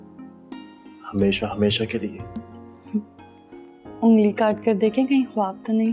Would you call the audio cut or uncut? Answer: uncut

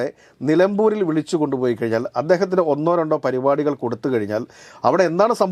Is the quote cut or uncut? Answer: uncut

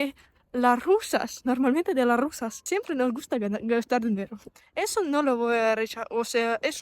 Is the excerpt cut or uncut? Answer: cut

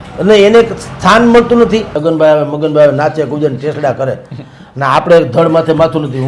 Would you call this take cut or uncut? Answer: cut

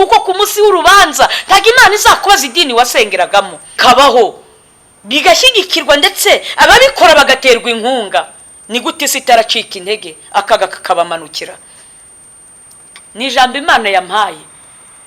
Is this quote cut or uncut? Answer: cut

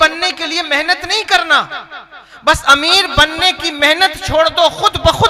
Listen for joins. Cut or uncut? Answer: uncut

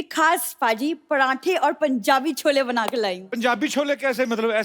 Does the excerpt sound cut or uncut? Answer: cut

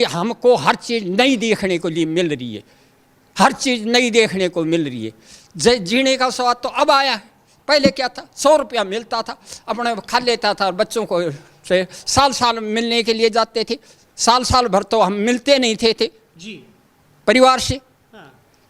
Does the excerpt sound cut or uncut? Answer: uncut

